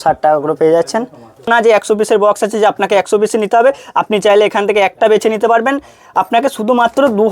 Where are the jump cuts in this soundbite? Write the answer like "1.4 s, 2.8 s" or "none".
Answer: 1.5 s